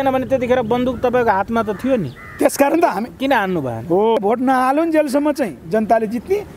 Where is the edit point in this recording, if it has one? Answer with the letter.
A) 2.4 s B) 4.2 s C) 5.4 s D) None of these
B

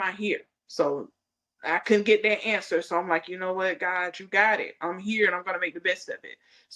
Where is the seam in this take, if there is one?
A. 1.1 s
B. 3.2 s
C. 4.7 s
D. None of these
D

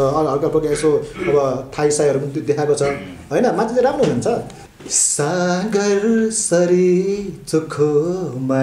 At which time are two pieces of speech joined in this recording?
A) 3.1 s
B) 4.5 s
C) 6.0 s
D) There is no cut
B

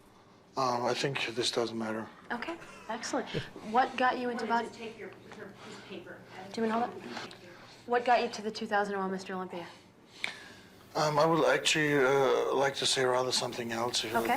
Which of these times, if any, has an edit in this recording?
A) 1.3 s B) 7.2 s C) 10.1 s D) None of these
B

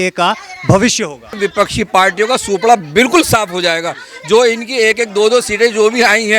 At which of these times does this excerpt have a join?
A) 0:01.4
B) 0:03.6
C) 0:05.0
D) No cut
A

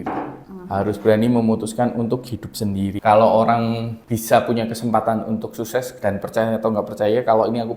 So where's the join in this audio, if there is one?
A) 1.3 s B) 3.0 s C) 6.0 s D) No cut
B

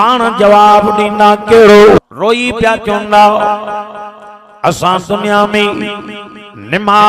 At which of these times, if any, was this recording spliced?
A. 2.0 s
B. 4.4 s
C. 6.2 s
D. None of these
A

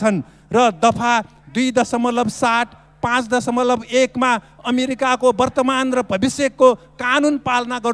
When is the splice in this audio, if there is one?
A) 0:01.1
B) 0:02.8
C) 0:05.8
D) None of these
D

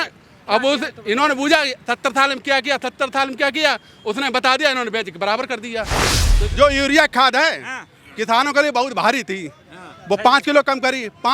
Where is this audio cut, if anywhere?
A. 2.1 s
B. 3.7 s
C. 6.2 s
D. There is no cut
C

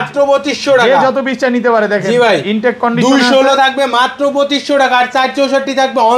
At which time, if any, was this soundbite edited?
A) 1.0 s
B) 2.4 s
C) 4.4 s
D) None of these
D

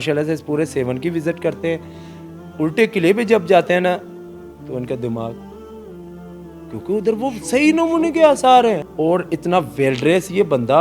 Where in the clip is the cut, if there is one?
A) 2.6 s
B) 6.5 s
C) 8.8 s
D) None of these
C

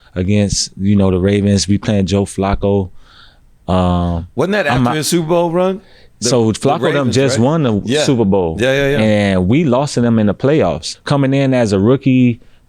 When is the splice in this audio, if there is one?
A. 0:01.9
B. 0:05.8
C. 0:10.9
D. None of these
C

